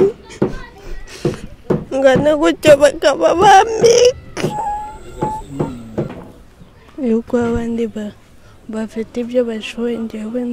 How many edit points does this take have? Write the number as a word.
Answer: one